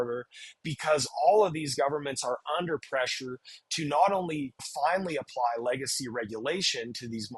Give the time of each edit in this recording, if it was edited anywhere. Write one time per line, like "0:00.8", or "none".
0:04.6